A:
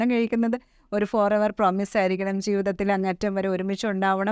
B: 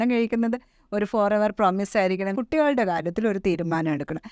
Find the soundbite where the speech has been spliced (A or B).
B